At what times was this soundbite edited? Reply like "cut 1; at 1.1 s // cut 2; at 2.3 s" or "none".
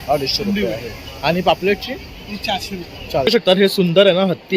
cut 1; at 3.2 s